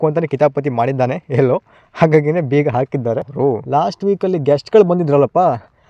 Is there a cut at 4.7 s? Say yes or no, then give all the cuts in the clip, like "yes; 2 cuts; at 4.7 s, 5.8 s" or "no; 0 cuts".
no; 1 cut; at 3.3 s